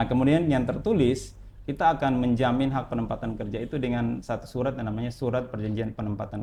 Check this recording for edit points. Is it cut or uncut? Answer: uncut